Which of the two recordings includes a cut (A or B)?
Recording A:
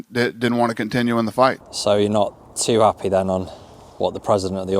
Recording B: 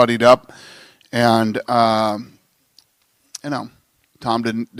A